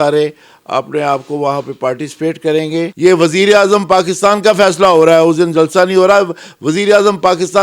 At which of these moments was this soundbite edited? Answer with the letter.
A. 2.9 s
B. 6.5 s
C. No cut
A